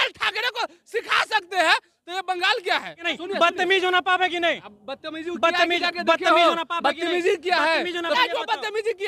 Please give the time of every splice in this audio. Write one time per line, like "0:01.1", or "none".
0:03.1
0:08.2